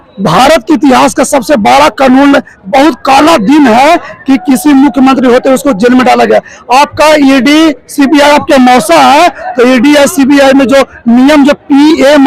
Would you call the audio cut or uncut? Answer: uncut